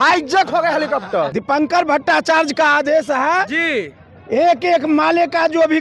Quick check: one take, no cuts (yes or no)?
no